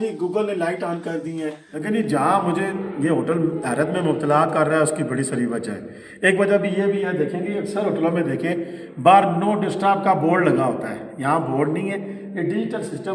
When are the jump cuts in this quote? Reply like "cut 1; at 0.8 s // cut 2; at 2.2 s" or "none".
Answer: cut 1; at 1.7 s